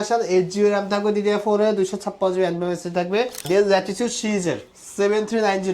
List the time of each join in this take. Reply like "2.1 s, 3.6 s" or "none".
3.4 s